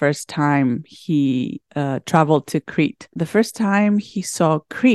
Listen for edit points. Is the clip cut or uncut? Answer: cut